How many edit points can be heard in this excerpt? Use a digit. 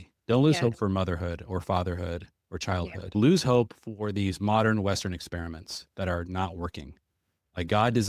1